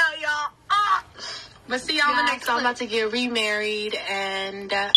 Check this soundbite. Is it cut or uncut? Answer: uncut